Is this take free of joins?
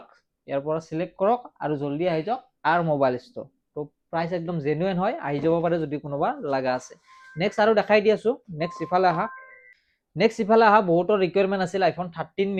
yes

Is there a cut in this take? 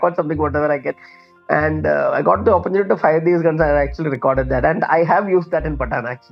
no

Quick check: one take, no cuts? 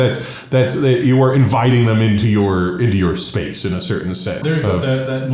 no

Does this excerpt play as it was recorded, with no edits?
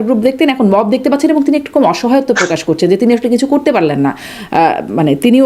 yes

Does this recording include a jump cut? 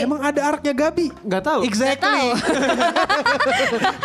no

